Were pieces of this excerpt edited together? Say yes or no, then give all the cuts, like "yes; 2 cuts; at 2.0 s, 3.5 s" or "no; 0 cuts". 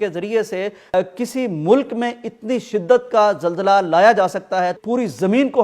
yes; 2 cuts; at 0.9 s, 4.8 s